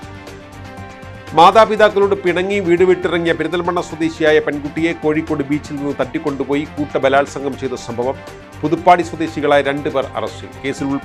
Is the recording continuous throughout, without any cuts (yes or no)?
no